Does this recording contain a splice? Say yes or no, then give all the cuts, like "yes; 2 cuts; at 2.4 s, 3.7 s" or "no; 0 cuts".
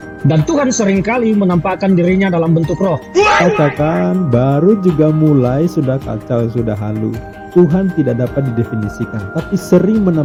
no; 0 cuts